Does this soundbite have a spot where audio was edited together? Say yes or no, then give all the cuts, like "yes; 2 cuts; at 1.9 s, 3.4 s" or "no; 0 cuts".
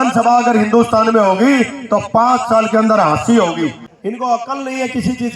yes; 1 cut; at 3.8 s